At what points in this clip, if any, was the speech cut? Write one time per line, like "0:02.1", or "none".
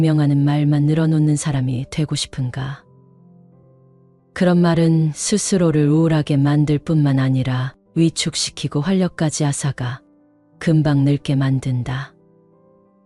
0:12.1